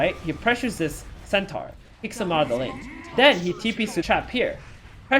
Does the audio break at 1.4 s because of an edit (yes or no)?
no